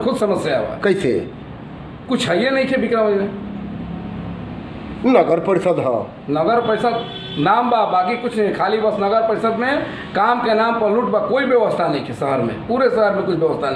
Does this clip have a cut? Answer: no; 0 cuts

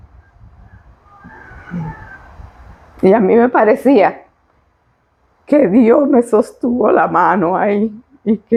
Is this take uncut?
yes; 0 cuts

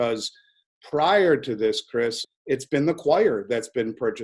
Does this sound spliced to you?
yes; 1 cut; at 2.2 s

